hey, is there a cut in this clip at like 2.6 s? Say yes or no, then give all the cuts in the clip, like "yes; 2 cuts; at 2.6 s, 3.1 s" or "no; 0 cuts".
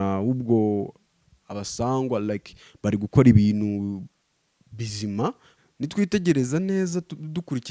no; 1 cut; at 5.5 s